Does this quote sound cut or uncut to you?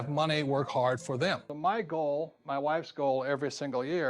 cut